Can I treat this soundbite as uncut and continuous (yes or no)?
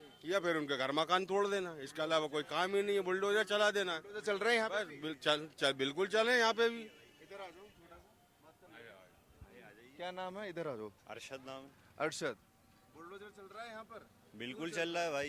yes